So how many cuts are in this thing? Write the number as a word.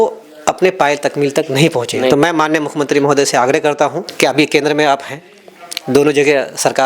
one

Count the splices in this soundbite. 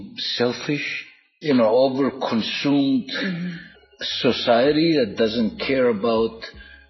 one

